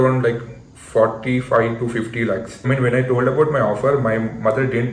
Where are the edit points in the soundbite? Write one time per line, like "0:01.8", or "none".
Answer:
0:02.5